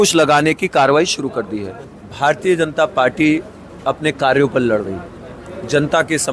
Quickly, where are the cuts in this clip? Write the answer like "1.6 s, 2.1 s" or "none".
1.9 s